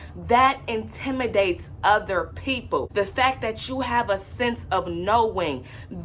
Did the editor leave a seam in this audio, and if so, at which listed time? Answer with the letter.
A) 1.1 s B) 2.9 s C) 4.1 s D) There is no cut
B